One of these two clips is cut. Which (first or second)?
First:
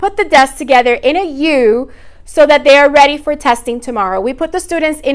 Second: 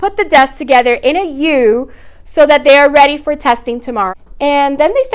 second